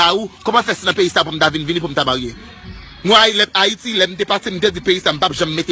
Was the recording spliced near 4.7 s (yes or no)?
no